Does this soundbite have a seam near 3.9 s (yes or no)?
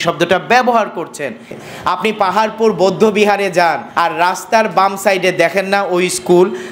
yes